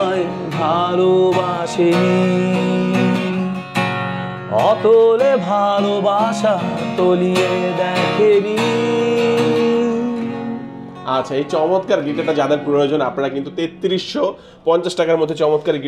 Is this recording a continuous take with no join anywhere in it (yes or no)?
yes